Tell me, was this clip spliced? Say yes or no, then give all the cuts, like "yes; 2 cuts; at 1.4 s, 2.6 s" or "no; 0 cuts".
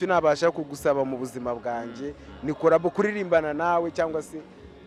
no; 0 cuts